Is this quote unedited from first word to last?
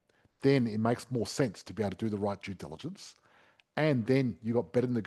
yes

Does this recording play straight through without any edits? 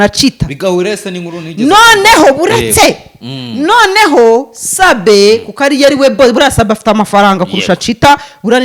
yes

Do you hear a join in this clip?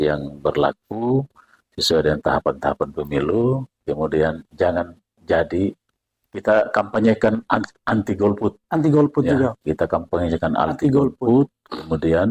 no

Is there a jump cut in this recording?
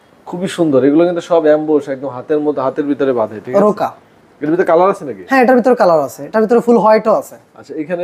no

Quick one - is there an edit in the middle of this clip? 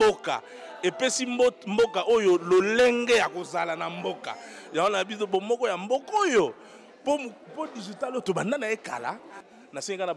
no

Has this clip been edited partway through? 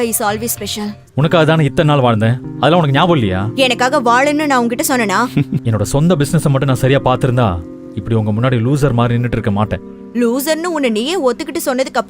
yes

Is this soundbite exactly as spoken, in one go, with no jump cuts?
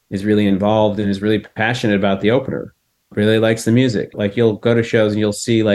no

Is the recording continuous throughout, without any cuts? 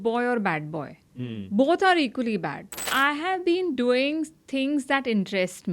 no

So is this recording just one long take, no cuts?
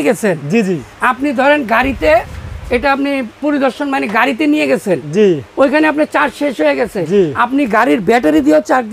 yes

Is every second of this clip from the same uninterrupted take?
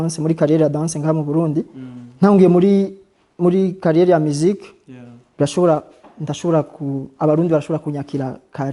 yes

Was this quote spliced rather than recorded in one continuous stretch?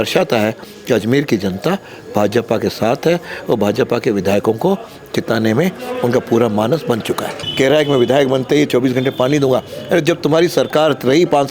yes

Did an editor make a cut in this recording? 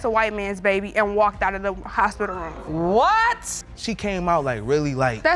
no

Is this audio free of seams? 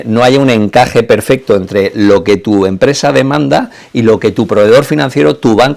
yes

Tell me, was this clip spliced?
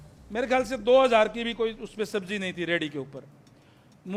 no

